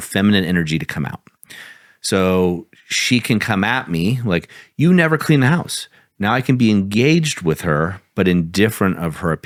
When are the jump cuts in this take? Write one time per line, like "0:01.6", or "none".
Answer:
none